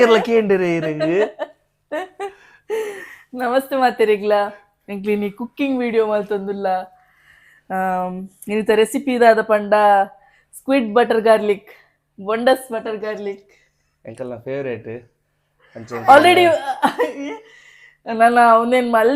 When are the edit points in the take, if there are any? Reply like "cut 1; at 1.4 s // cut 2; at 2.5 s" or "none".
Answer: none